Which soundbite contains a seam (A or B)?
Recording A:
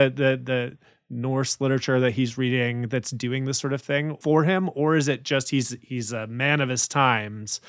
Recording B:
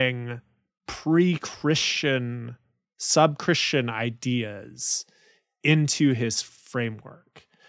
A